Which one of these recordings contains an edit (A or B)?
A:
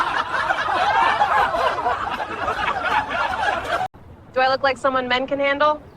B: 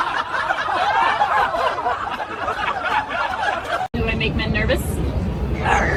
A